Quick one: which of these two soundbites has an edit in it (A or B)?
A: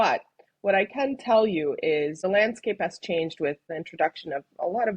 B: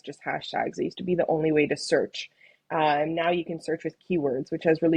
A